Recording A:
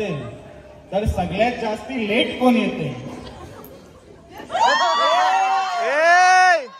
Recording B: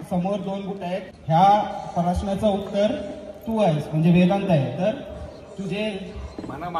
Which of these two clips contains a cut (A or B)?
B